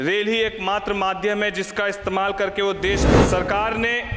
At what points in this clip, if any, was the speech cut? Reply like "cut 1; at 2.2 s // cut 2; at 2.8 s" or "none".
cut 1; at 3.1 s